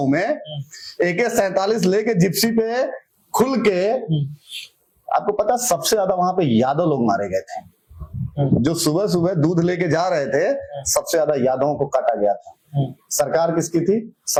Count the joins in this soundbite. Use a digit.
0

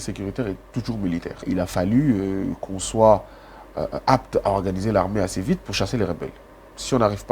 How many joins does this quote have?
1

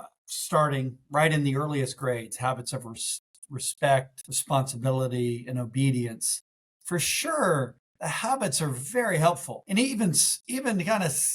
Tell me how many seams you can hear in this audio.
1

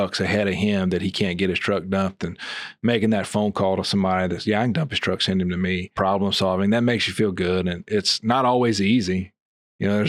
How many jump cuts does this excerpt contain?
1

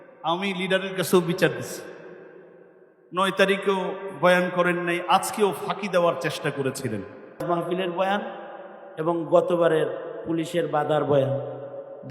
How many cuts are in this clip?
1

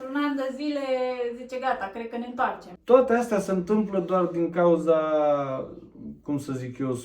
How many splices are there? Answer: 1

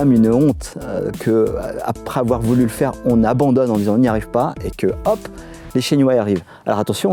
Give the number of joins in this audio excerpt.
0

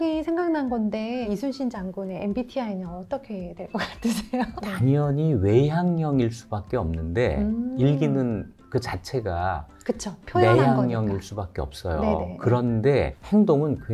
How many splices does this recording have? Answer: 1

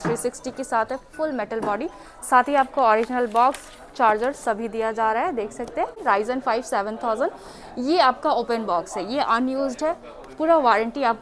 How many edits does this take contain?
1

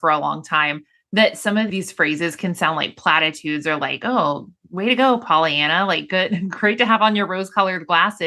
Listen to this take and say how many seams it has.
1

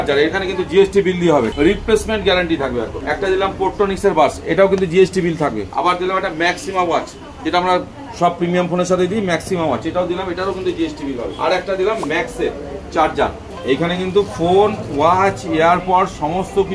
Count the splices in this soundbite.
5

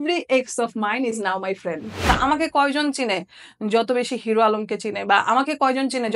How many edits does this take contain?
1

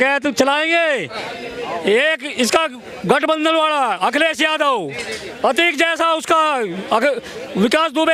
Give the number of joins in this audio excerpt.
0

